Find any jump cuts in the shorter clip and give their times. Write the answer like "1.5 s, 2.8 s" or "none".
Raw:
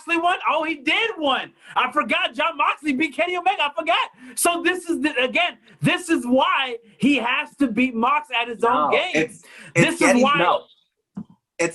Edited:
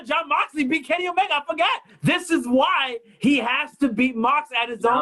1.9 s

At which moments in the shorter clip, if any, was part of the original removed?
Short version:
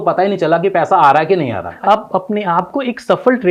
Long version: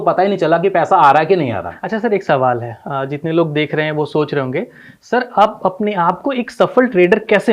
1.8 s

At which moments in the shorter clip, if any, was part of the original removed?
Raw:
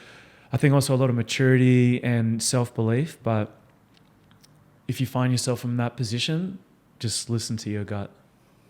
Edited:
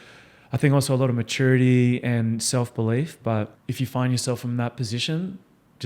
3.6 s

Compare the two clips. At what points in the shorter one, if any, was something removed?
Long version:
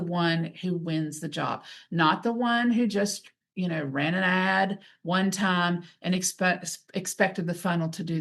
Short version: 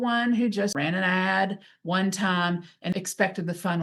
0.7 s, 2.9 s

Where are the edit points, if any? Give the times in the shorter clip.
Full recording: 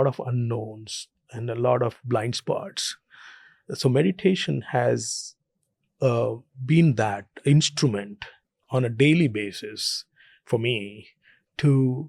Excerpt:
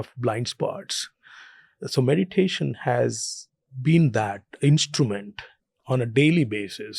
3.7 s

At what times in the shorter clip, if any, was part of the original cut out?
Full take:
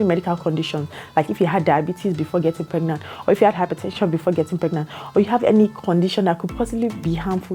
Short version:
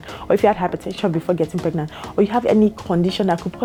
none

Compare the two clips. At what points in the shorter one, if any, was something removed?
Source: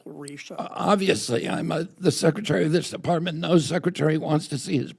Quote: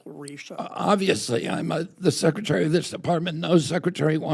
none

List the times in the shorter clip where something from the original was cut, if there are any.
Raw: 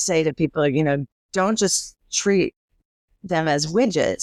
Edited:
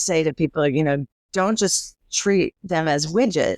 2.6 s

